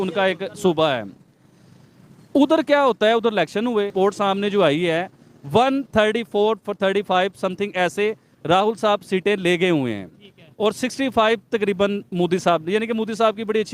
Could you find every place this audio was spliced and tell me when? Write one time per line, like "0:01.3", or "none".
0:03.9